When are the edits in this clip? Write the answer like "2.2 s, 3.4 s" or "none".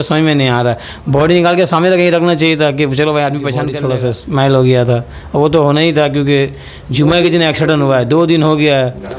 3.7 s